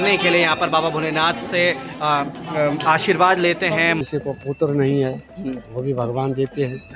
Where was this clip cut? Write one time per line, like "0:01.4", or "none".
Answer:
0:04.0